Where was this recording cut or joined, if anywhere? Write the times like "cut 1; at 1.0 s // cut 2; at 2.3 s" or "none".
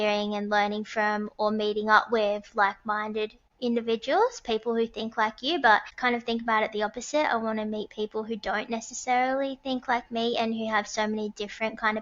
cut 1; at 3.4 s // cut 2; at 5.9 s